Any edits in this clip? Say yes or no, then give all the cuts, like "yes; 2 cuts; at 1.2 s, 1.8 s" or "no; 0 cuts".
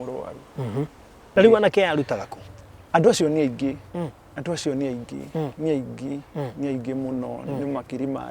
yes; 1 cut; at 1.3 s